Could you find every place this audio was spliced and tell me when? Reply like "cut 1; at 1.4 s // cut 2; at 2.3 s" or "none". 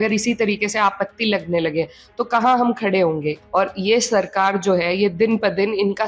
cut 1; at 3.4 s